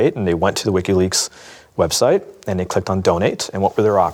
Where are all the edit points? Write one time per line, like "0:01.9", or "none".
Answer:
none